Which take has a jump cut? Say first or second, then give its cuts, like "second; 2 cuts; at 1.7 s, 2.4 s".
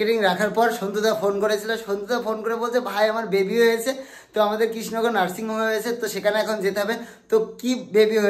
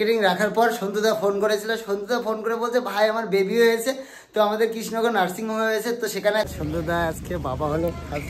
second; 1 cut; at 6.5 s